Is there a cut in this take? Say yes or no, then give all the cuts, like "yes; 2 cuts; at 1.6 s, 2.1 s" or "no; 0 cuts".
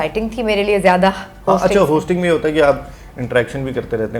no; 0 cuts